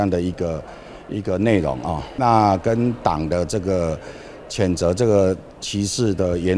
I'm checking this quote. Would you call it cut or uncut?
cut